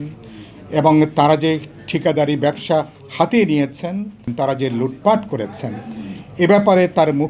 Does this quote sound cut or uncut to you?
cut